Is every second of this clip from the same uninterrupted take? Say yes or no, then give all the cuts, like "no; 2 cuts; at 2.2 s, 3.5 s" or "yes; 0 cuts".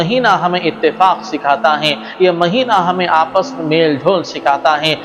yes; 0 cuts